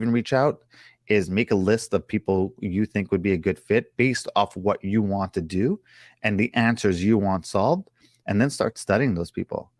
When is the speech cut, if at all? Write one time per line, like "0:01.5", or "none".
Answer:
none